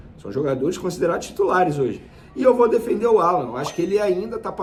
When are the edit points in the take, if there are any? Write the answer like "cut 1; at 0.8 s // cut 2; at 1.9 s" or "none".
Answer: none